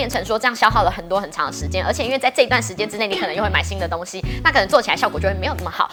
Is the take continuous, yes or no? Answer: yes